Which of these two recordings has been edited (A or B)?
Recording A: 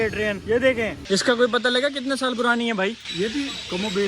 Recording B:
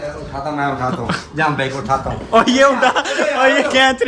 A